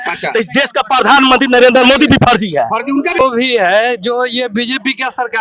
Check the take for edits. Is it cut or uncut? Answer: cut